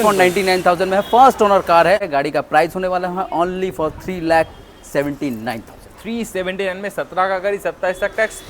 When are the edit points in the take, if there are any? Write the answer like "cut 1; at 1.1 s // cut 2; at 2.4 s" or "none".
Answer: cut 1; at 2.1 s